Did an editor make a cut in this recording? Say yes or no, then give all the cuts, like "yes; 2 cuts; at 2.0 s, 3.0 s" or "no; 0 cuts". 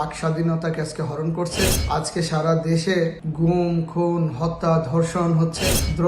no; 0 cuts